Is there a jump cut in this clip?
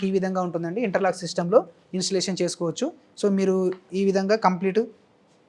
no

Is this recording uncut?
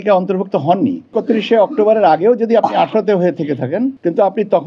no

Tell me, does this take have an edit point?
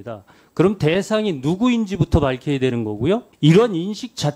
yes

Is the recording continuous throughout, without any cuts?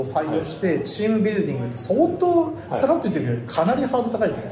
yes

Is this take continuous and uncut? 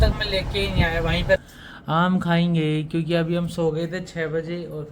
no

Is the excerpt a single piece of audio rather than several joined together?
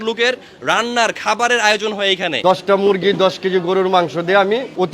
no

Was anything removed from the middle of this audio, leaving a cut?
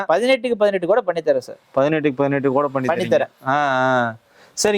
no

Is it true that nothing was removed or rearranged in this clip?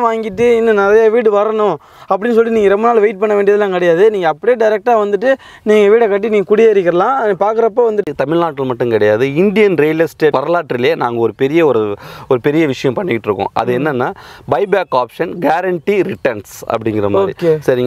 no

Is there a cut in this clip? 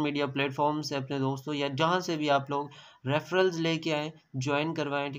no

